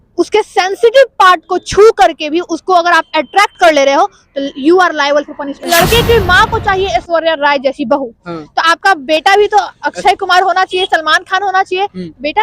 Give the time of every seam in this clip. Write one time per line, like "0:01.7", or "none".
0:05.6